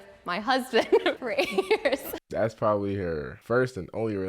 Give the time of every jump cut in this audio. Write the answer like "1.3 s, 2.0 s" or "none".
2.2 s, 3.3 s